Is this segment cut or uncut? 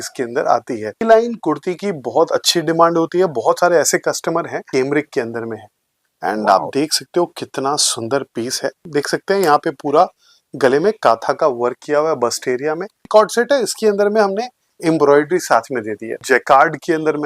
cut